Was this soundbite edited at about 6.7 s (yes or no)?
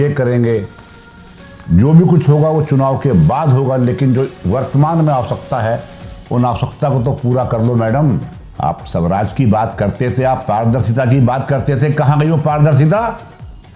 no